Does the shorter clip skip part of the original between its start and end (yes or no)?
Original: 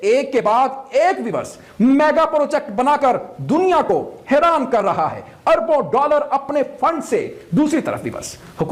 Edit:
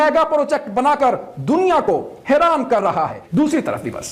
yes